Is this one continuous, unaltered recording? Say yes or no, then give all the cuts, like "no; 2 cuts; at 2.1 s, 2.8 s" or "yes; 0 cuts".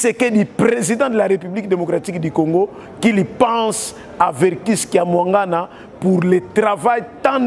yes; 0 cuts